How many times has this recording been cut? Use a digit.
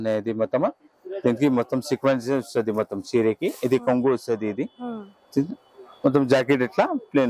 0